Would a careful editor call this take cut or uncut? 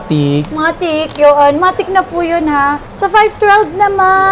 uncut